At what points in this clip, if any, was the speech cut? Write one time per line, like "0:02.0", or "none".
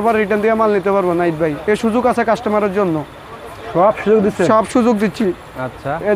none